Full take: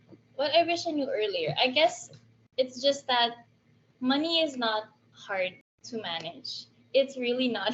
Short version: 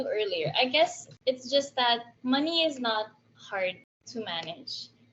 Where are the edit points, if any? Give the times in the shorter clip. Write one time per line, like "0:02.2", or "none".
0:01.1
0:02.1

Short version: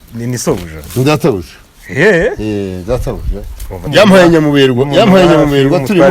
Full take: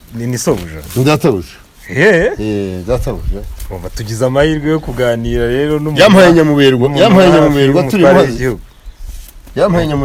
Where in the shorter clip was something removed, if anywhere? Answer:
0:03.9

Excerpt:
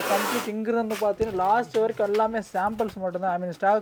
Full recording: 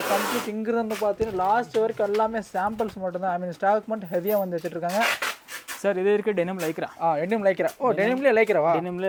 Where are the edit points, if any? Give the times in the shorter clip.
none

